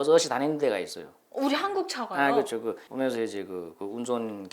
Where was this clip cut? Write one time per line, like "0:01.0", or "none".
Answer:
0:02.9